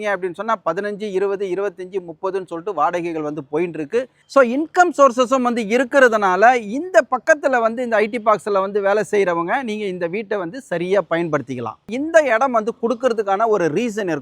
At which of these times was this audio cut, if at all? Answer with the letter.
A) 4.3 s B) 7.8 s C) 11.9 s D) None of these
C